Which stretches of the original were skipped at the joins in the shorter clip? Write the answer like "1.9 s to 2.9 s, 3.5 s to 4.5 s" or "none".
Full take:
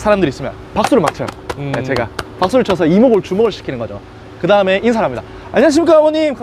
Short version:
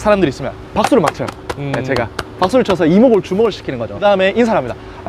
3.9 s to 4.4 s